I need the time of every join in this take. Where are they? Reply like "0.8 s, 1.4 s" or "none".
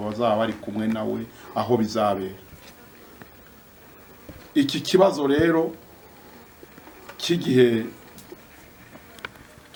none